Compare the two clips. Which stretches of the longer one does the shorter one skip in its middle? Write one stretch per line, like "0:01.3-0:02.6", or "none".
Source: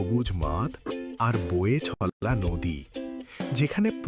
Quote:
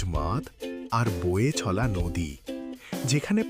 0:02.0-0:02.2